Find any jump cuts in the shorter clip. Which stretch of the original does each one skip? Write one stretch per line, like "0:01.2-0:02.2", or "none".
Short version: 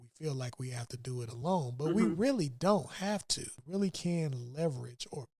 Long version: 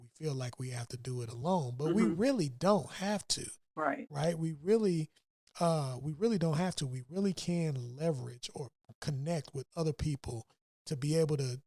0:03.5-0:06.9